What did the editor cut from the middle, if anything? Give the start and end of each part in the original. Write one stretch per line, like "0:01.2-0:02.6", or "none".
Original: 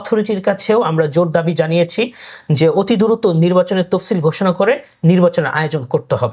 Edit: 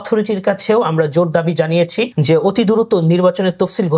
0:02.1-0:02.5